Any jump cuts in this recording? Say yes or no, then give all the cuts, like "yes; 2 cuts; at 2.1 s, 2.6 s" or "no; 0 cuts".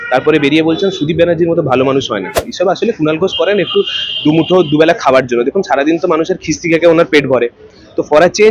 yes; 1 cut; at 2.5 s